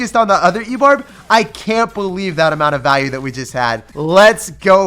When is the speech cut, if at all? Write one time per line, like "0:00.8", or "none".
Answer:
0:03.9